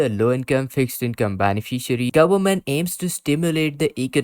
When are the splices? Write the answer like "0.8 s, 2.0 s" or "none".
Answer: 2.1 s